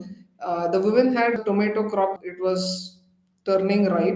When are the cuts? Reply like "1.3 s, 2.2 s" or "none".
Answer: 1.4 s, 2.2 s